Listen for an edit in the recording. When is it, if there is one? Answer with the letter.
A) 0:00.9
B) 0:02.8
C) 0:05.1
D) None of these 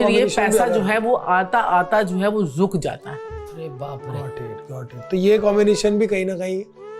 D